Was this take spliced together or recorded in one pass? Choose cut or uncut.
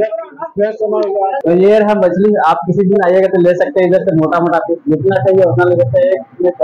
cut